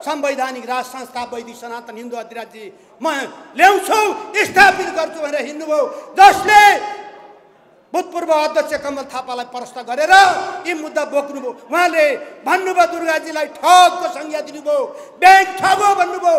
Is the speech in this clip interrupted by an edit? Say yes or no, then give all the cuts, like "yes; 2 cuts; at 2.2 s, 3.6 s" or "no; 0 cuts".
no; 0 cuts